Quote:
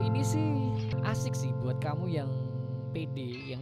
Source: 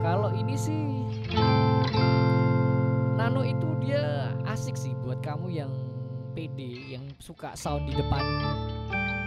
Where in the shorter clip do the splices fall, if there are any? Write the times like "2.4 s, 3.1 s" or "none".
0.9 s